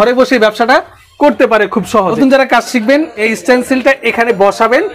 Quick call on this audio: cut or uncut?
cut